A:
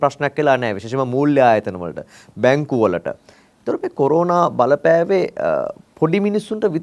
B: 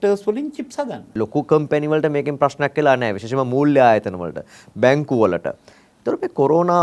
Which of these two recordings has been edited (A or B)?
B